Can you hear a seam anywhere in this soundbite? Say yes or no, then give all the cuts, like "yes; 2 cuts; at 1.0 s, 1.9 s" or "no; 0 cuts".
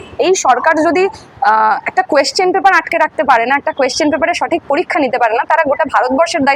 no; 0 cuts